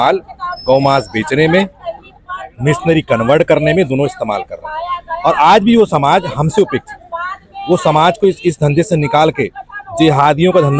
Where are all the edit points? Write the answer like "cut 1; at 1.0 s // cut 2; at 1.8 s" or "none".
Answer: none